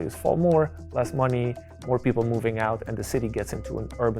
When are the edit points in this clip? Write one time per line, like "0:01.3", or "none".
none